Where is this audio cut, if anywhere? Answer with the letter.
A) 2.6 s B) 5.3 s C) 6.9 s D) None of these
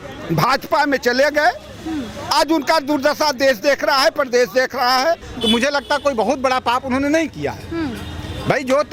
B